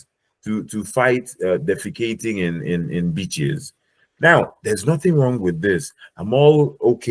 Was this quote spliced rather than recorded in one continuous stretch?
no; 0 cuts

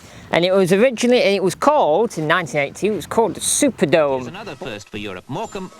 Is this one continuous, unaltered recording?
no; 1 cut; at 4.5 s

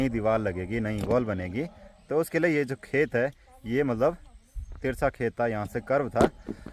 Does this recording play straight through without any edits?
yes; 0 cuts

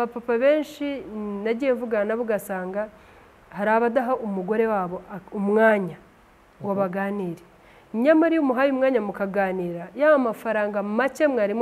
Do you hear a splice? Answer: no; 0 cuts

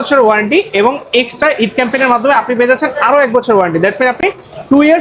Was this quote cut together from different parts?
no; 0 cuts

